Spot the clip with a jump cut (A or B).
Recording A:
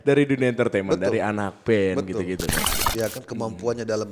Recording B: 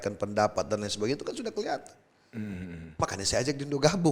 A